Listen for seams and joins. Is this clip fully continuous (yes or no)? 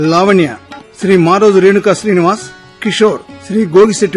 no